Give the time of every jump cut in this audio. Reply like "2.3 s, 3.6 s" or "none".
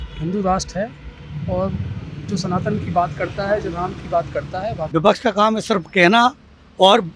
4.9 s